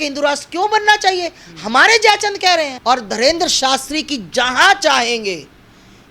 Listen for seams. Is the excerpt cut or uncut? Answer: cut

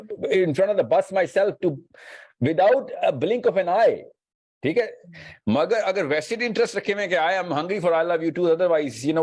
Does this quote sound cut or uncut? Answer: uncut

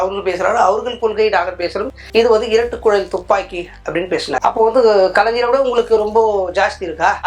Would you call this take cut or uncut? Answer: cut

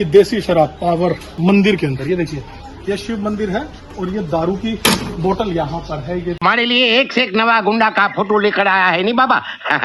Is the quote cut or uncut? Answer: cut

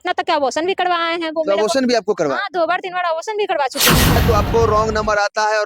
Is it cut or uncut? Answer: cut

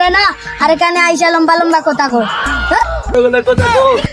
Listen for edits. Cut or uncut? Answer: cut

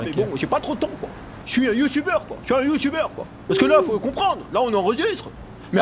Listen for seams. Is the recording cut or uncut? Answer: uncut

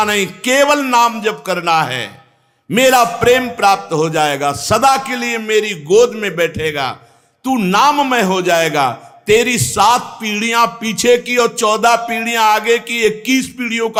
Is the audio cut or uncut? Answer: uncut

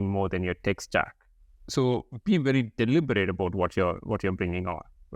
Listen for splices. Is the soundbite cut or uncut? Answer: cut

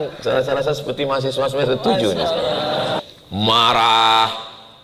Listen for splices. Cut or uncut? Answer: cut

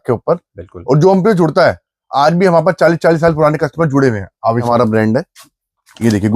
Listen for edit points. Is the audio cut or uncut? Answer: cut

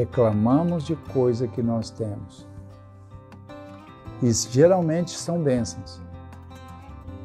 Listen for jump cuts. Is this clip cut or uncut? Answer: uncut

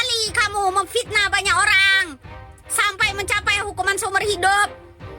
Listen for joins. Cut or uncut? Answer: uncut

